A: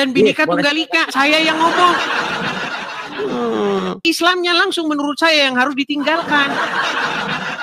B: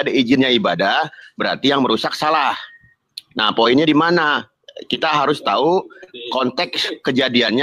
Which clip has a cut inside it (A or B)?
A